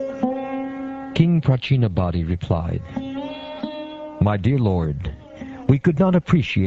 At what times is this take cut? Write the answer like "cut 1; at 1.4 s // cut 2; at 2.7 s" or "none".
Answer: cut 1; at 2.7 s